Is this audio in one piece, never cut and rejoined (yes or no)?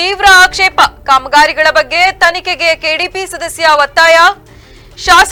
yes